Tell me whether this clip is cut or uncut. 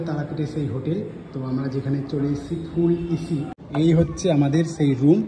cut